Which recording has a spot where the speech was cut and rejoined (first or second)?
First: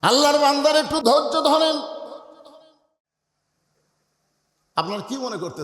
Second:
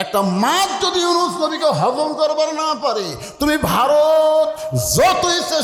first